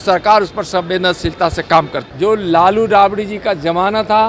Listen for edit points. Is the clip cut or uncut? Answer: cut